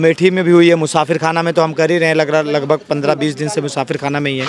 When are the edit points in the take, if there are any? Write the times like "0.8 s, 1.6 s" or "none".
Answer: none